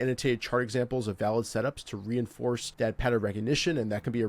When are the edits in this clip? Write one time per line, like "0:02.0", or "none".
0:02.7